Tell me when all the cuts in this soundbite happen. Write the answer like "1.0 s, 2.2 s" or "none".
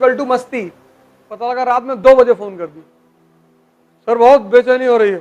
1.6 s